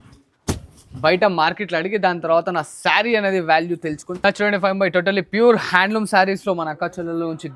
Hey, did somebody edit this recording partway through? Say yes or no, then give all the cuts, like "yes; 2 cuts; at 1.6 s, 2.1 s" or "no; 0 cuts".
yes; 1 cut; at 4.1 s